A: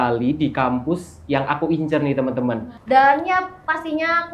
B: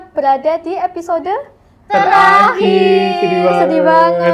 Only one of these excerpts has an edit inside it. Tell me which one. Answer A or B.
A